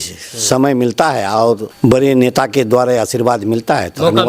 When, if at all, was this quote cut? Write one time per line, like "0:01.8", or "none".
0:01.7